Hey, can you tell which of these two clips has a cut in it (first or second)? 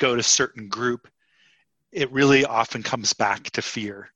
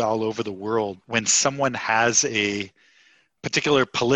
second